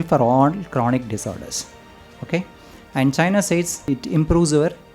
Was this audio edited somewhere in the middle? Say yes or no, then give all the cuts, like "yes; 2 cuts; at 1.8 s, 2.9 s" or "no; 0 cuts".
yes; 1 cut; at 3.8 s